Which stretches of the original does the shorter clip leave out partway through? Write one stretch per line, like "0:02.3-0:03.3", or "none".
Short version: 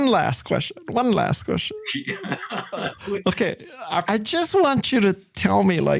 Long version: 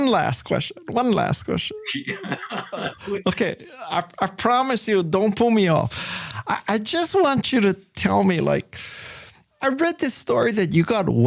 0:04.0-0:06.6